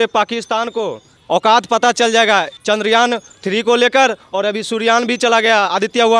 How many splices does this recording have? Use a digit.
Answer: 3